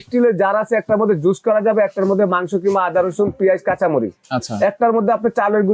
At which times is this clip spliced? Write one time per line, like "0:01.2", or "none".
none

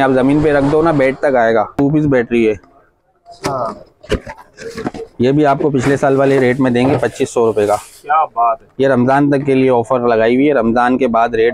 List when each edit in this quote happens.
0:01.8

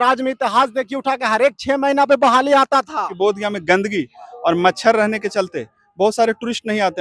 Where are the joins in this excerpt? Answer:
0:03.1

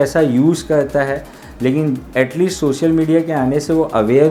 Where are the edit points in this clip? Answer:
none

